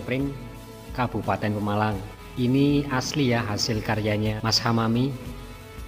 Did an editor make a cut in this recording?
yes; 2 cuts; at 2.2 s, 4.4 s

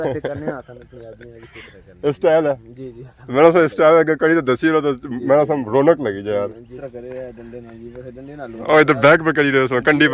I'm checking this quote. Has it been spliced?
yes; 1 cut; at 6.8 s

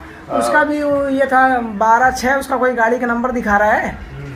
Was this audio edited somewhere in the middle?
no; 0 cuts

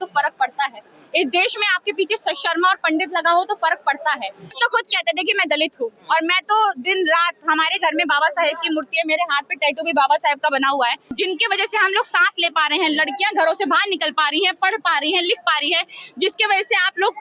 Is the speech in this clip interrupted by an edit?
yes; 2 cuts; at 4.5 s, 11.1 s

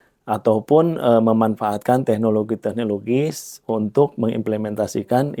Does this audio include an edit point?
no; 0 cuts

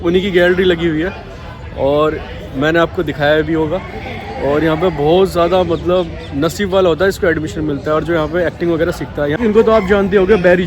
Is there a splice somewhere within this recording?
yes; 1 cut; at 9.4 s

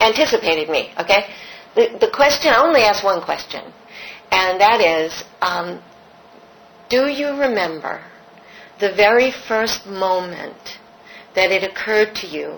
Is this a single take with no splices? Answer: yes; 0 cuts

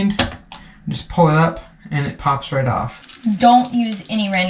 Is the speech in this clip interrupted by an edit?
yes; 1 cut; at 3.0 s

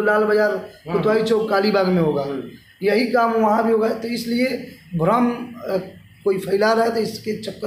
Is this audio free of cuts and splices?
yes; 0 cuts

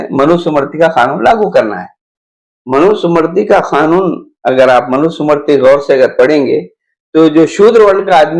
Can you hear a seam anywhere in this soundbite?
no; 0 cuts

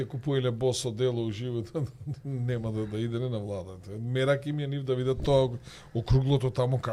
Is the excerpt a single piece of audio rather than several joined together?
yes; 0 cuts

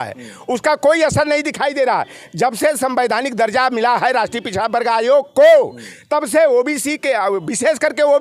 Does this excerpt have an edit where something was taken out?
no; 0 cuts

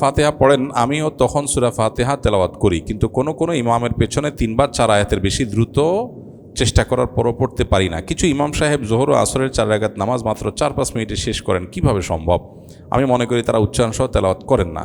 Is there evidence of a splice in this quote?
no; 0 cuts

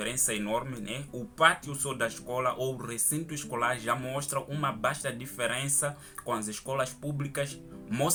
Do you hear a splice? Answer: no; 0 cuts

